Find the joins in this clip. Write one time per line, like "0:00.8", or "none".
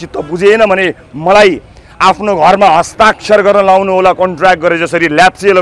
none